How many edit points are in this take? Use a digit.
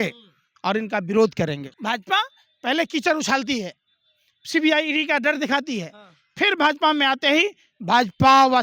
1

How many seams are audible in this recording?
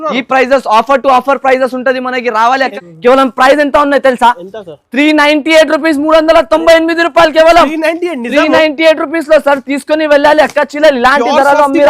1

